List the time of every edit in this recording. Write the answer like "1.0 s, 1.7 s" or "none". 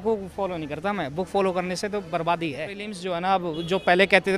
3.0 s